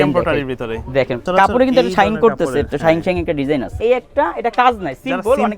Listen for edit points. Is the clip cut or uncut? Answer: cut